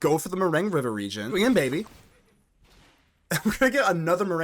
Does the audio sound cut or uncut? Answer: cut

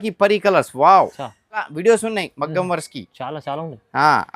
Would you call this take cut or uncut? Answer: cut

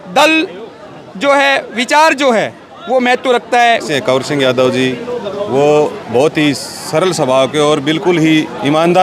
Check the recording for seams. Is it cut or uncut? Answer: cut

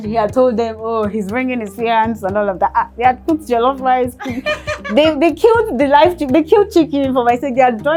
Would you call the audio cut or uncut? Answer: uncut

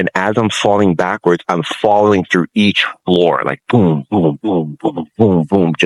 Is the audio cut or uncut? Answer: uncut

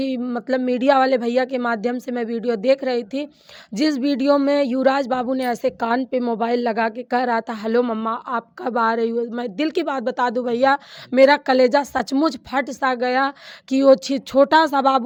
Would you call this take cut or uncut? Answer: uncut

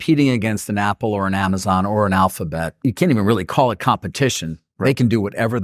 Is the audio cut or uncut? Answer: cut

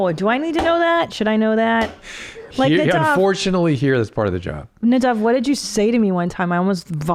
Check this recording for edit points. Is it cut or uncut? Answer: uncut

